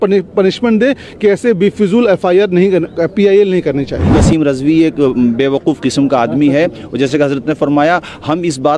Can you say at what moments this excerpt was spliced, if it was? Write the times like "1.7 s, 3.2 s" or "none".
4.1 s